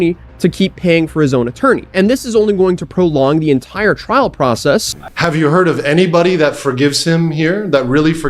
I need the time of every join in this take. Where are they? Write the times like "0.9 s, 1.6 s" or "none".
5.0 s